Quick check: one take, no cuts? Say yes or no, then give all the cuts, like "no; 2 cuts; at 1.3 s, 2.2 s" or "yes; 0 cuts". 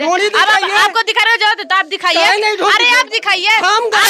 yes; 0 cuts